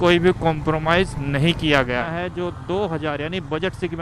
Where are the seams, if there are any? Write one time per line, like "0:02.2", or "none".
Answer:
0:02.0